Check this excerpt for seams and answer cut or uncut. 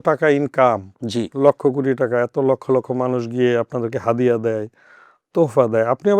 uncut